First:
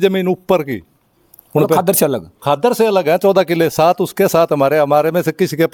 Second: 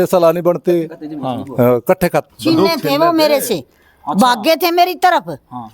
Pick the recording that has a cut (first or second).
second